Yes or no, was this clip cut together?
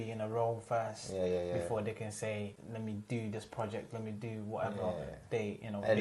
yes